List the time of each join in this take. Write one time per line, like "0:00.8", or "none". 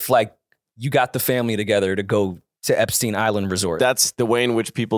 0:03.8